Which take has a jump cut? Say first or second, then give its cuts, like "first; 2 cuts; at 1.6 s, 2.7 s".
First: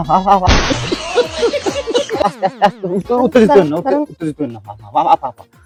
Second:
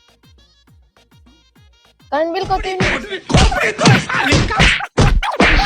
second; 1 cut; at 2.9 s